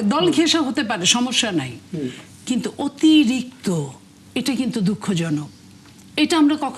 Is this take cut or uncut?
uncut